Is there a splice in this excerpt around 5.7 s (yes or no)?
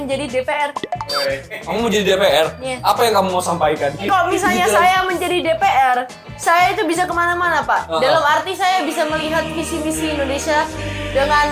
no